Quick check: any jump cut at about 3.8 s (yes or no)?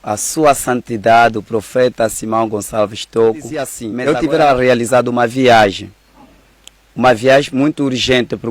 yes